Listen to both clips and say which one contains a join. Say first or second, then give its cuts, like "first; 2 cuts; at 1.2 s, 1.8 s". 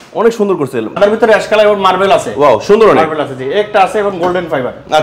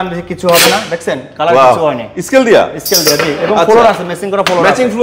first; 1 cut; at 1.0 s